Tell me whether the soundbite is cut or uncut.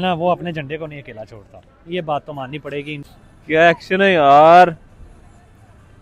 uncut